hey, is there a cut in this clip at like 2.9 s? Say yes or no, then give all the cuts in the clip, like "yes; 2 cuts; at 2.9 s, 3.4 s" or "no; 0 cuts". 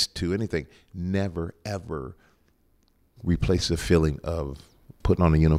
no; 0 cuts